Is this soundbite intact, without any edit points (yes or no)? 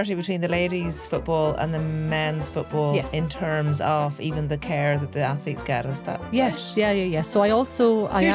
yes